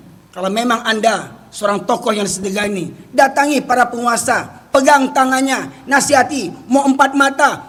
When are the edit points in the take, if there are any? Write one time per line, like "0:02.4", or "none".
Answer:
none